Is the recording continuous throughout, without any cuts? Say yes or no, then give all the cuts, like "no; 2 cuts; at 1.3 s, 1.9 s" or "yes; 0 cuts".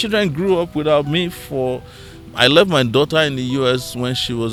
yes; 0 cuts